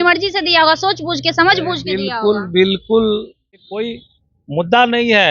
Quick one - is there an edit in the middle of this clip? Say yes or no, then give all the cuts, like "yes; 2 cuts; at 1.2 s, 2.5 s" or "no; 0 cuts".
yes; 1 cut; at 3.7 s